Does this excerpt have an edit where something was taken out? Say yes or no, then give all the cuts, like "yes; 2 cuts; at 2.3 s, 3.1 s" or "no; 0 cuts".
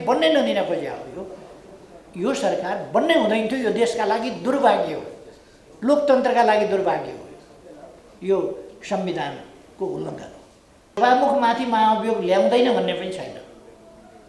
yes; 1 cut; at 11.0 s